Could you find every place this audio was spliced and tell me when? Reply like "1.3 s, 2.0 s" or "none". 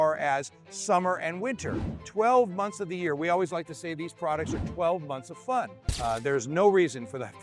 5.8 s